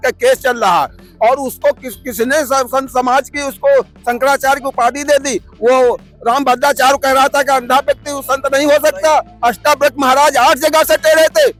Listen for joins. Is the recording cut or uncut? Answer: uncut